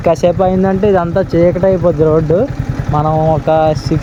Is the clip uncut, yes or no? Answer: yes